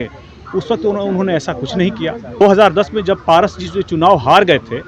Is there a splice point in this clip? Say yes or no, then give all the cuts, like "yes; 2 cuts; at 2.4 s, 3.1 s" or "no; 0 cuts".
yes; 1 cut; at 2.4 s